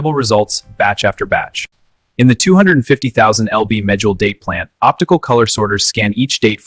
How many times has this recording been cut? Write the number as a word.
one